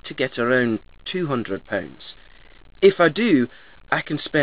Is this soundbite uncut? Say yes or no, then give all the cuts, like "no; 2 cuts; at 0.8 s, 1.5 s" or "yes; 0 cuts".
yes; 0 cuts